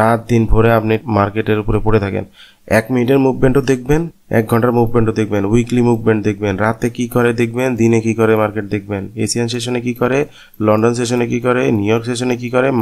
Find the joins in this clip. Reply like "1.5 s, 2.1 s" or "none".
1.0 s